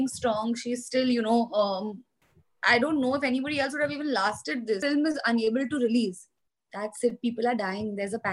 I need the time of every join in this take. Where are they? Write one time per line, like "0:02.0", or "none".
0:04.8

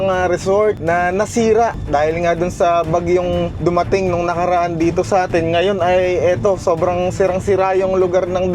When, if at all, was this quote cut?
0:00.8
0:01.8
0:03.5

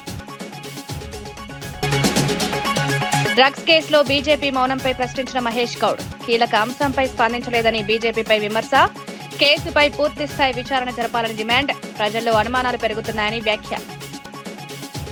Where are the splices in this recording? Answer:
none

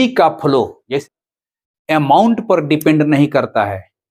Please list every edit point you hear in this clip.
0:01.0

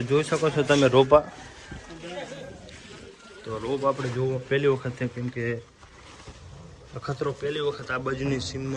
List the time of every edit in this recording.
none

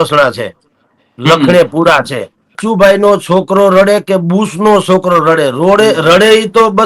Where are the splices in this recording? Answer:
0:02.6

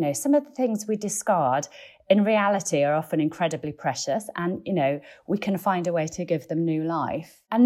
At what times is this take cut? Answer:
none

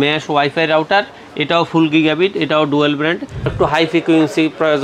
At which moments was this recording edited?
0:03.5

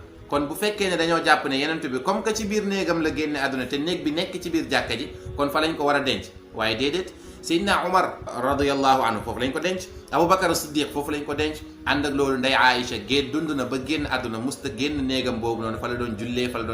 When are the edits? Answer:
0:08.3

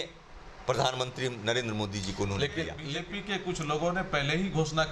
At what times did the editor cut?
0:02.7

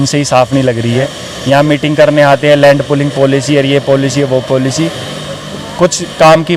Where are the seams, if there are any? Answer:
none

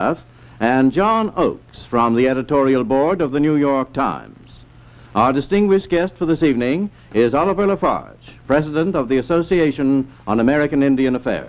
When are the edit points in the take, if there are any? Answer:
0:05.0

